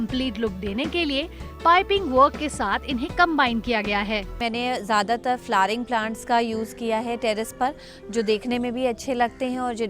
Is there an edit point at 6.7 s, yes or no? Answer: no